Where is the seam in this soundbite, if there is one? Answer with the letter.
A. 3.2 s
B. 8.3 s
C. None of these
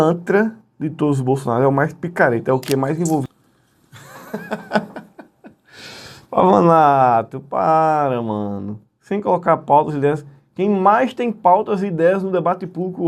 A